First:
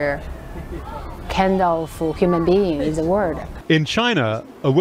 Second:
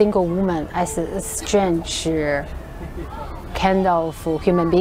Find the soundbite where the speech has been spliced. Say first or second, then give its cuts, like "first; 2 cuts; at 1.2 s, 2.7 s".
first; 1 cut; at 3.5 s